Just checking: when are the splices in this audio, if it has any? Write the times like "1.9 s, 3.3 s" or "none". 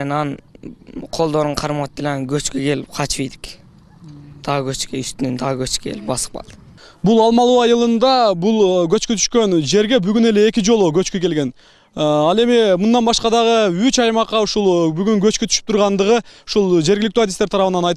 none